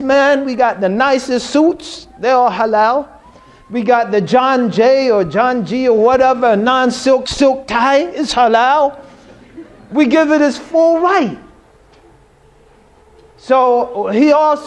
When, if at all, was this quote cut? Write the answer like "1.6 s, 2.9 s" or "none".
none